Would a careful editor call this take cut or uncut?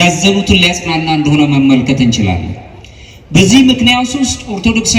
uncut